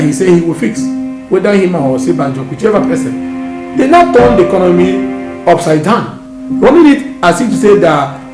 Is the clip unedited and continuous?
yes; 0 cuts

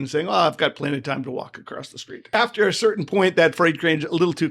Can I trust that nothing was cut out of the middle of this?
no; 1 cut; at 2.3 s

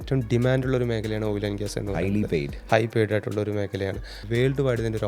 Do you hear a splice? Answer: yes; 1 cut; at 4.2 s

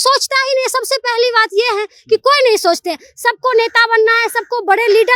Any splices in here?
no; 0 cuts

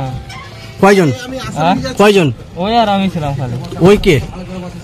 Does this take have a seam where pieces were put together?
no; 0 cuts

